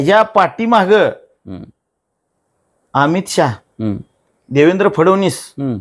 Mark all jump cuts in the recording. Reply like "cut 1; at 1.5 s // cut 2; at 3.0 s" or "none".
none